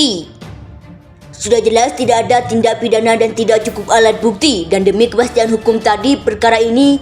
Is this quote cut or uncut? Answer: uncut